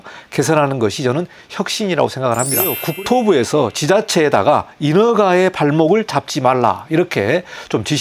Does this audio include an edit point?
yes; 1 cut; at 2.8 s

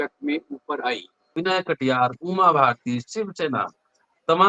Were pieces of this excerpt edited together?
yes; 1 cut; at 1.4 s

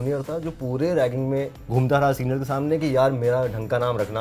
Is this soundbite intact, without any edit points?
no; 1 cut; at 1.6 s

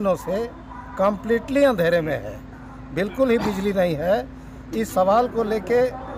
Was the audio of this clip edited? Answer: no; 0 cuts

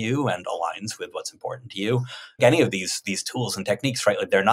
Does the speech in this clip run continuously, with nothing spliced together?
no; 1 cut; at 2.4 s

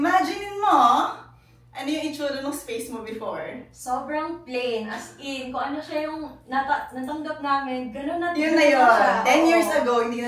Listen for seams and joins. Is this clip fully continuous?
yes; 0 cuts

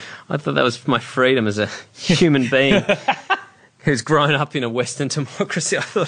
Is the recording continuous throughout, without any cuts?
yes; 0 cuts

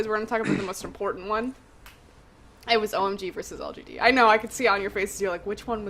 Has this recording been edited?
no; 0 cuts

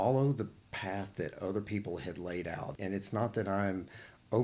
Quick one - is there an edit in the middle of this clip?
yes; 1 cut; at 2.7 s

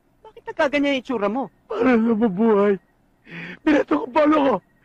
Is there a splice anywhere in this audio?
yes; 1 cut; at 1.6 s

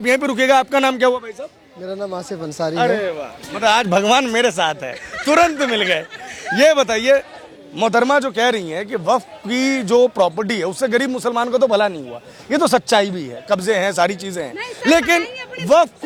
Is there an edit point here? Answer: no; 0 cuts

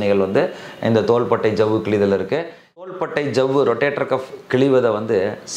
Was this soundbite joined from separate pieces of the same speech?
yes; 1 cut; at 2.8 s

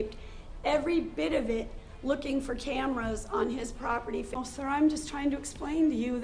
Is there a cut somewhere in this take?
yes; 1 cut; at 4.4 s

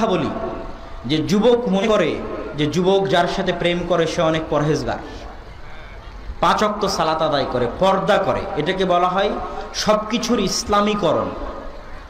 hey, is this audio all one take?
no; 1 cut; at 1.8 s

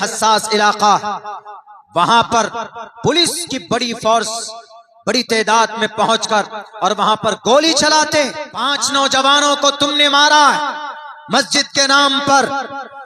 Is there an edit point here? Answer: yes; 1 cut; at 8.8 s

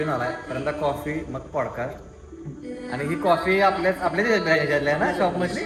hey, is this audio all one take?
yes; 0 cuts

